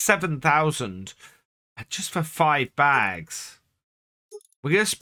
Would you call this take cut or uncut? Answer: uncut